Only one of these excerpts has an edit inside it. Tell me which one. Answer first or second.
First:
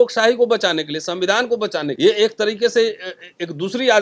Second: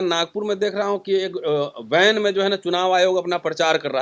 first